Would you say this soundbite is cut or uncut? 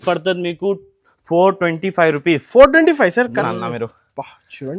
cut